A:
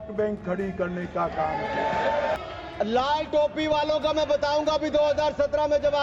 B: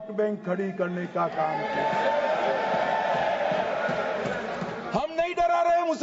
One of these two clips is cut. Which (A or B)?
A